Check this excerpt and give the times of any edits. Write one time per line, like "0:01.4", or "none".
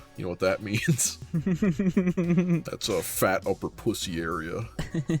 0:01.1
0:02.7